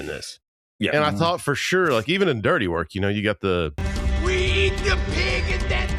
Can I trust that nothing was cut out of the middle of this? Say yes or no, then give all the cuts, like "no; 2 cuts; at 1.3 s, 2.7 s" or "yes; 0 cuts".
yes; 0 cuts